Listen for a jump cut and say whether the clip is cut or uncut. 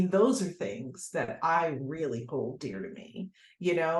uncut